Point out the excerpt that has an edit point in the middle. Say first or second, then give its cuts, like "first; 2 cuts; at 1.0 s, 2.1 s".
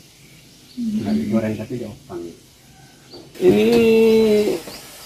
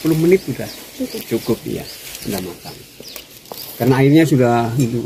first; 1 cut; at 3.3 s